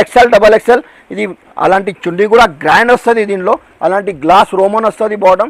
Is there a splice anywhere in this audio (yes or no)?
no